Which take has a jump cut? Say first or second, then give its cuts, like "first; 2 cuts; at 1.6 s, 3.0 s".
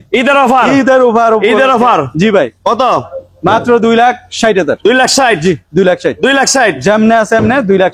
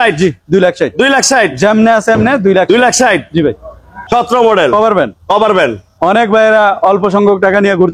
second; 1 cut; at 4.0 s